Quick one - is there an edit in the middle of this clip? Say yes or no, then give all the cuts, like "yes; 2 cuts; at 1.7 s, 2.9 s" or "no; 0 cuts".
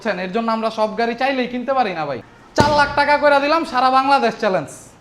yes; 1 cut; at 2.6 s